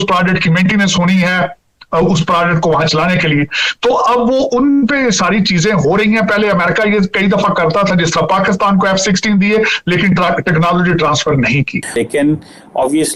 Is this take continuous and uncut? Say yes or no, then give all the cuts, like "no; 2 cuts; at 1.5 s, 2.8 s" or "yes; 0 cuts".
no; 1 cut; at 12.0 s